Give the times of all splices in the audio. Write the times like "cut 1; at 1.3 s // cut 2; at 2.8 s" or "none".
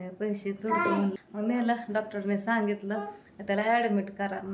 cut 1; at 1.3 s

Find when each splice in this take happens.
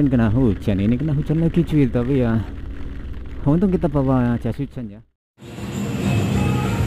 cut 1; at 4.7 s

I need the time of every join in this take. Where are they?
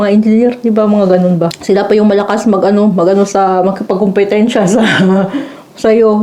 cut 1; at 1.5 s

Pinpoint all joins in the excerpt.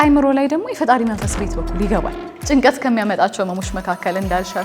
cut 1; at 2.3 s

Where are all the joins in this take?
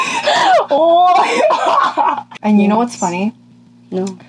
cut 1; at 2.3 s

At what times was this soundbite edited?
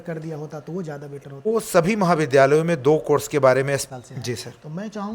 cut 1; at 1.5 s // cut 2; at 3.9 s

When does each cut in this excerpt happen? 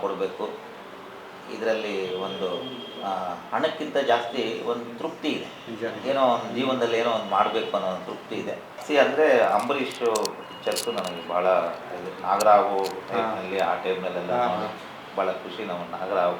cut 1; at 8.8 s

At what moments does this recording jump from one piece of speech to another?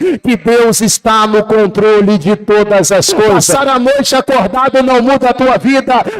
cut 1; at 3.5 s

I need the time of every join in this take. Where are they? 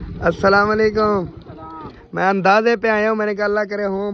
none

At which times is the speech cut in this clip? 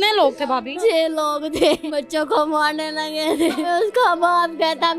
cut 1; at 0.8 s // cut 2; at 1.8 s // cut 3; at 3.7 s

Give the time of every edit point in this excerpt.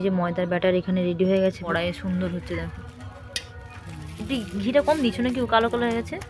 cut 1; at 1.7 s

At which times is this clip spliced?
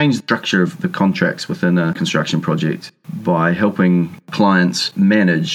none

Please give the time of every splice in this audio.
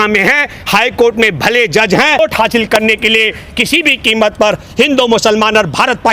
cut 1; at 2.2 s

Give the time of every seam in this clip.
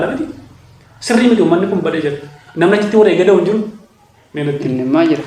none

